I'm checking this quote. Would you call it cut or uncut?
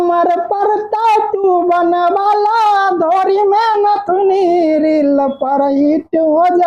uncut